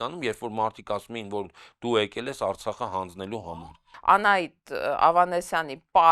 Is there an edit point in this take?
yes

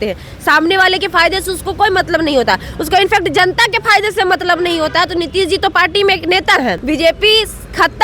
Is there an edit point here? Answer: yes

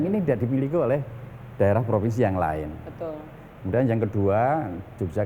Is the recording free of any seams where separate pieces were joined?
yes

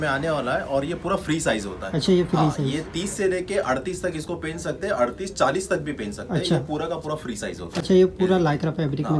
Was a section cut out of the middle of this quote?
no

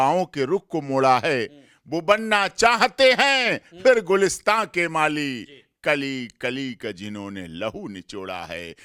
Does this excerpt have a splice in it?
no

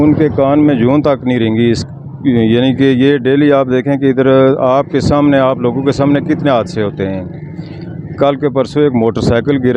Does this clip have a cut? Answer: no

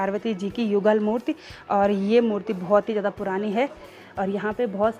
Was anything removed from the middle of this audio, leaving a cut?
no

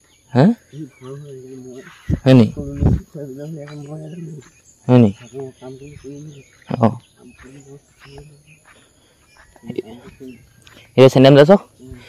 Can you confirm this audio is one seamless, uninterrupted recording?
yes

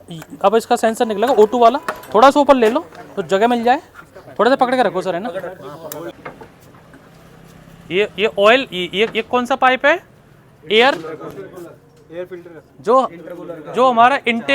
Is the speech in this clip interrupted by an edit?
yes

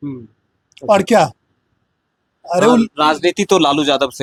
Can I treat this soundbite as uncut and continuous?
yes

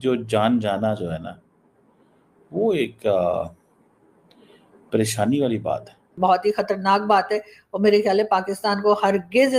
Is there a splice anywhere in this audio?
yes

